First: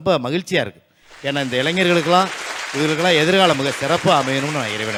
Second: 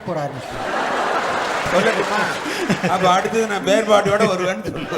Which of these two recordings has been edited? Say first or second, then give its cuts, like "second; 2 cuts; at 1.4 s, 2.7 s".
second; 1 cut; at 1.7 s